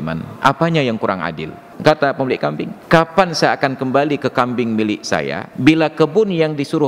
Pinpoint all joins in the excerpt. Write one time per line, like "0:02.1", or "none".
0:01.7
0:02.7
0:05.4